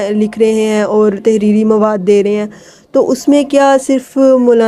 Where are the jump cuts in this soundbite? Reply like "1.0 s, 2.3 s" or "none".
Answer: none